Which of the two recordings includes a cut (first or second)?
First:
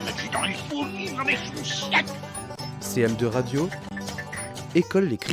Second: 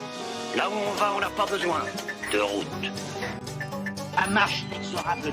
first